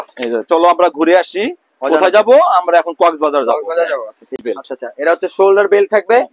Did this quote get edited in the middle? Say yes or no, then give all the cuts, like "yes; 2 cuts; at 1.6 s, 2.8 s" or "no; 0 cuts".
yes; 1 cut; at 4.4 s